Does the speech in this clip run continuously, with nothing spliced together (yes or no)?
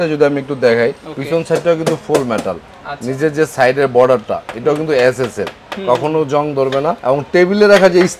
yes